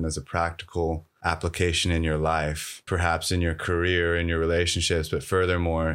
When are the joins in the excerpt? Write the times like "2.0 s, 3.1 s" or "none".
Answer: 1.1 s, 2.9 s